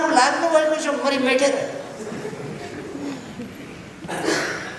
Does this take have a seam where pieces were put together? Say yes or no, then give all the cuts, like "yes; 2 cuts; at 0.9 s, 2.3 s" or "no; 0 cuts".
no; 0 cuts